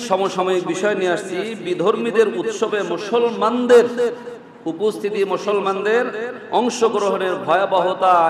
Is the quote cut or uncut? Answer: uncut